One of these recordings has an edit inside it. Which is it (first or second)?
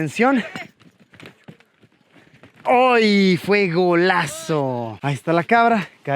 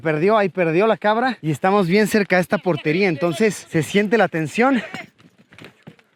first